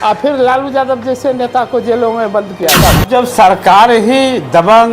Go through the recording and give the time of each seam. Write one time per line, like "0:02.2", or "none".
0:03.1